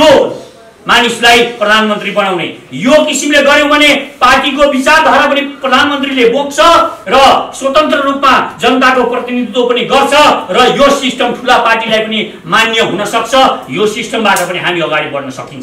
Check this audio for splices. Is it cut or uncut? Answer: uncut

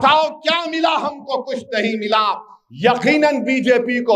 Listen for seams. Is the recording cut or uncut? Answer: uncut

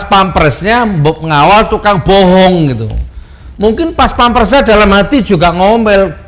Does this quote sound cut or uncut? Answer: uncut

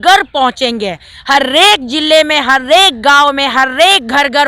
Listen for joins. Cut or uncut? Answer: uncut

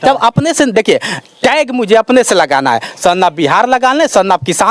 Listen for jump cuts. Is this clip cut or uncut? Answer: uncut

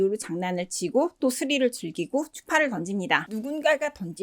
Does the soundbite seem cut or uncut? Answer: cut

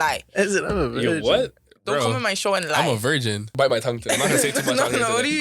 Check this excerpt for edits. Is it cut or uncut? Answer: cut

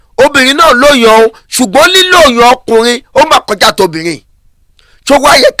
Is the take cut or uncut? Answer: uncut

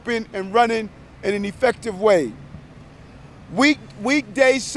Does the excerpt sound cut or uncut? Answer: uncut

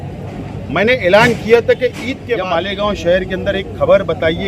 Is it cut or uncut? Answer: cut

